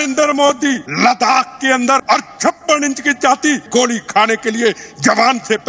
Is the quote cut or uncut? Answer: cut